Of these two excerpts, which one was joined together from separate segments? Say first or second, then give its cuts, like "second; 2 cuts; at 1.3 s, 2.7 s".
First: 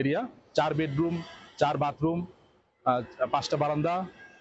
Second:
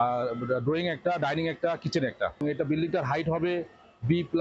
second; 1 cut; at 2.4 s